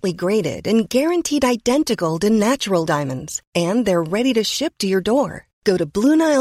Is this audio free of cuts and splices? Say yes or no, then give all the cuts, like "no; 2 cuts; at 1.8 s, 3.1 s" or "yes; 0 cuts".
yes; 0 cuts